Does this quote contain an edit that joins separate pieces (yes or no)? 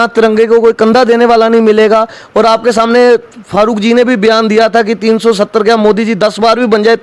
no